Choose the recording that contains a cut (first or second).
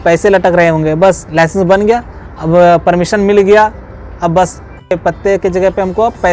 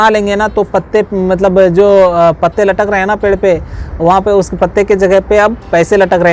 first